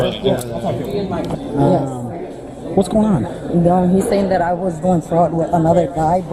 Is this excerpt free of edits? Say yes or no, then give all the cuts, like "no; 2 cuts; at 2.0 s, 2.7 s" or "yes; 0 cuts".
yes; 0 cuts